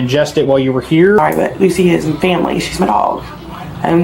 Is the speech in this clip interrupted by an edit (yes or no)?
yes